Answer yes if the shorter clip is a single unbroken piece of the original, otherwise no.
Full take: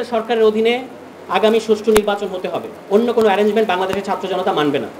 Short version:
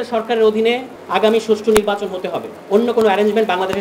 no